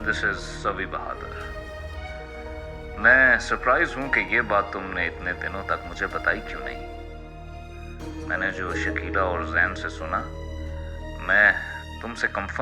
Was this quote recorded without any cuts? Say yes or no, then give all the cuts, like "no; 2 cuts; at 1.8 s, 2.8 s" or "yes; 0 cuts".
yes; 0 cuts